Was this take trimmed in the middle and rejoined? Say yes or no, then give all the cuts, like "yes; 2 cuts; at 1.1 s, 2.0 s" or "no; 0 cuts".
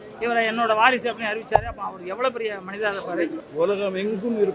yes; 1 cut; at 3.4 s